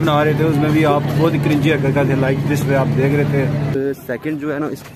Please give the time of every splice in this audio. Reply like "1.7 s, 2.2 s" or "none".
3.8 s

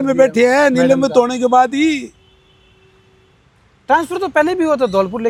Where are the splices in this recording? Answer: none

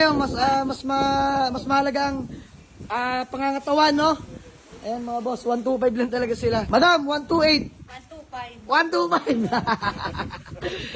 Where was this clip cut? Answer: 6.7 s

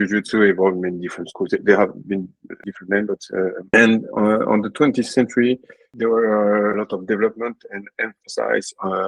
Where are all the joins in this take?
5.9 s, 6.8 s

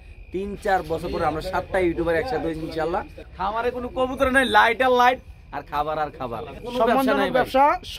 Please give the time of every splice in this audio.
3.6 s, 6.7 s

